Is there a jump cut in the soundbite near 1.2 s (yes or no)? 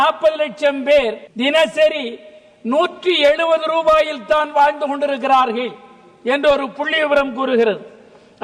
yes